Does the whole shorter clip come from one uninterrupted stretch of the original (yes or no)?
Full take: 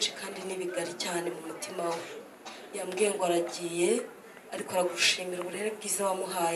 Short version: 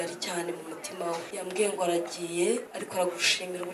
no